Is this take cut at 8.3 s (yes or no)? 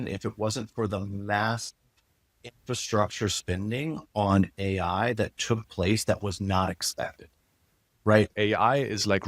yes